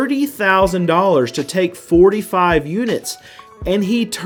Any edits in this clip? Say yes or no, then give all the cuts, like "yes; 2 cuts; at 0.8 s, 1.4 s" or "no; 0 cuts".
no; 0 cuts